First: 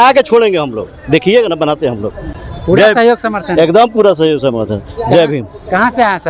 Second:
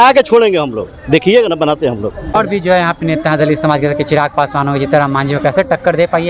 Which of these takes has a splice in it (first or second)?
second